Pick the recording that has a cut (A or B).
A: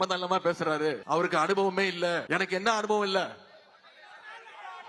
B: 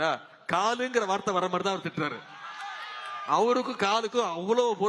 A